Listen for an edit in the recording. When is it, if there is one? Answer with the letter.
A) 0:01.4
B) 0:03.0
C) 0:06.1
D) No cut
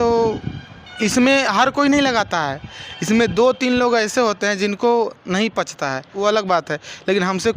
C